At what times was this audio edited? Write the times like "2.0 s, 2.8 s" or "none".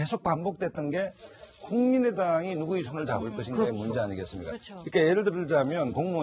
none